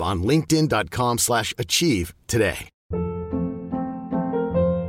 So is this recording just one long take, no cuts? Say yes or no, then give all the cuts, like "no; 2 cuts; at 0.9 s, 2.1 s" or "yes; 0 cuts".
no; 1 cut; at 2.7 s